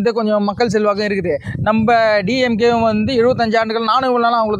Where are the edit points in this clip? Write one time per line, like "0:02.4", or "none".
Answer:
none